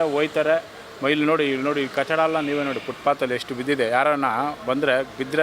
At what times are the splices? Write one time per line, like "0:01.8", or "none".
none